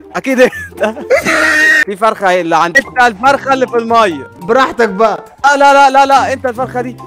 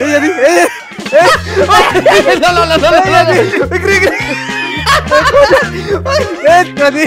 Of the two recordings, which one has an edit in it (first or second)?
first